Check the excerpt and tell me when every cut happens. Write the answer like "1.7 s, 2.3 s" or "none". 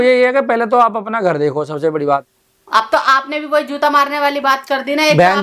2.4 s